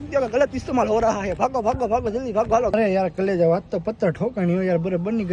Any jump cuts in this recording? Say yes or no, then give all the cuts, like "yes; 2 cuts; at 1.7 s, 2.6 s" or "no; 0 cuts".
yes; 2 cuts; at 1.4 s, 2.7 s